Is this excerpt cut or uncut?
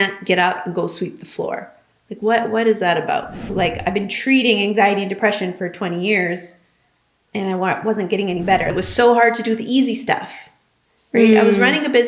cut